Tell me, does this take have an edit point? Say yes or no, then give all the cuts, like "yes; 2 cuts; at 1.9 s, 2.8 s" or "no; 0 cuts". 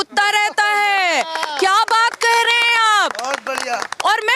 no; 0 cuts